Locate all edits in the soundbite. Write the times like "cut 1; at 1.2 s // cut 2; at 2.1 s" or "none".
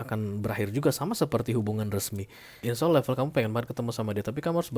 cut 1; at 2.6 s